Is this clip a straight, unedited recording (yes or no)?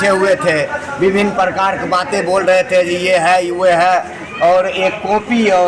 yes